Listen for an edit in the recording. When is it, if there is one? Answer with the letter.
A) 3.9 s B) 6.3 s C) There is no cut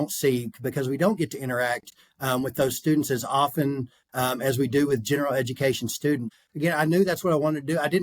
B